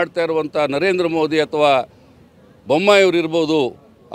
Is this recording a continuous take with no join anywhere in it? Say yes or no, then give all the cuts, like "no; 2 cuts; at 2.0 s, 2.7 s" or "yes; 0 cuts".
yes; 0 cuts